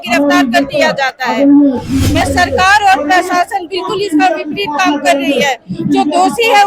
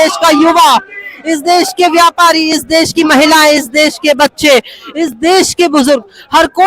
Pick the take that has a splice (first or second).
first